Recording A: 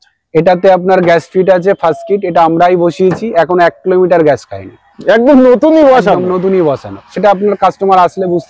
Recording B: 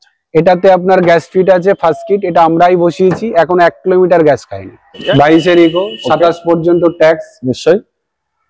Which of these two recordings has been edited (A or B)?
B